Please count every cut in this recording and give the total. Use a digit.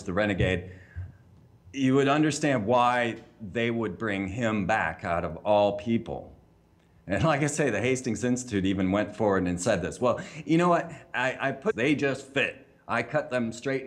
0